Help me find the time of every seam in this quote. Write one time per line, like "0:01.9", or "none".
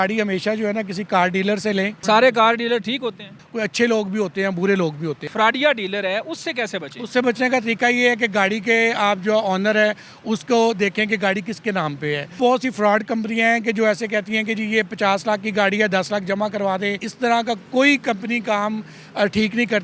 0:02.0
0:03.4
0:05.3
0:12.4
0:17.1

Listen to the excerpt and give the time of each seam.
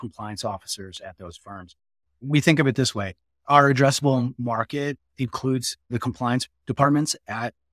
0:06.2

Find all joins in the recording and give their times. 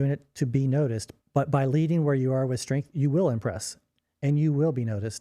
0:01.1

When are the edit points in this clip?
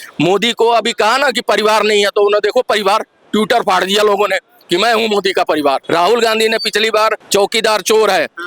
0:05.8
0:07.2

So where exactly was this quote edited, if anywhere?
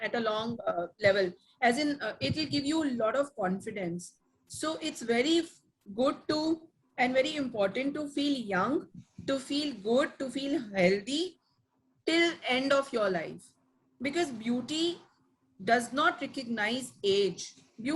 none

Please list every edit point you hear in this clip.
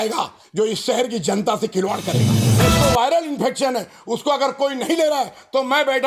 0:02.4

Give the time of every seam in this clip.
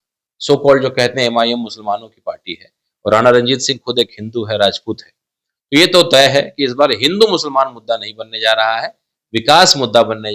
none

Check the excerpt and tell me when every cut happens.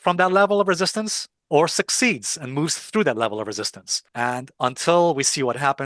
none

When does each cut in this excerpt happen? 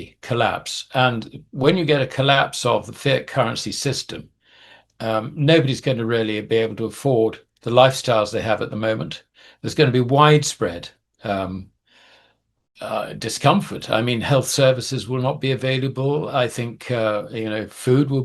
none

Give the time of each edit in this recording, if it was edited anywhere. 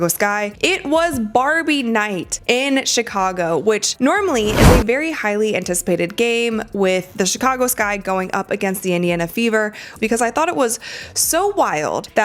0:09.9

